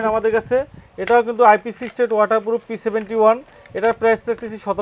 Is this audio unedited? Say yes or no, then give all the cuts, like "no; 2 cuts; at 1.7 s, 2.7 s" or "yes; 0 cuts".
yes; 0 cuts